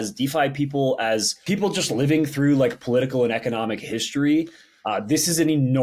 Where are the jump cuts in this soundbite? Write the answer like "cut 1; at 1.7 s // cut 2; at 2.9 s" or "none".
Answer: cut 1; at 1.3 s